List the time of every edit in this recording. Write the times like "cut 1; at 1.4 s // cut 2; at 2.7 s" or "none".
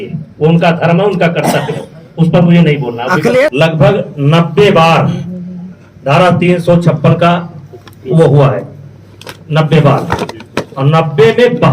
cut 1; at 3.5 s